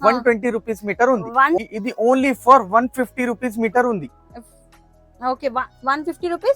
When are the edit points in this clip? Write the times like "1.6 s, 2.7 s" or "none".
1.6 s